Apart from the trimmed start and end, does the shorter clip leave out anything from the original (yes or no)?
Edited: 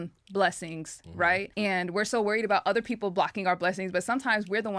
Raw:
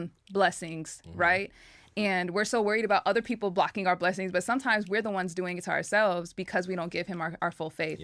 yes